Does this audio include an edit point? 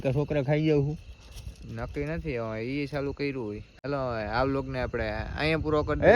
yes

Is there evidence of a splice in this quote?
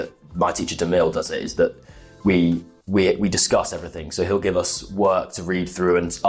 no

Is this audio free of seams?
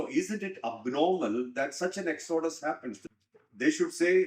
no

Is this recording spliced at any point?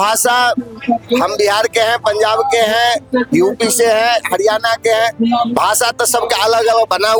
no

